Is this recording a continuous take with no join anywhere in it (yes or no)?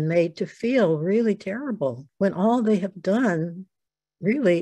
no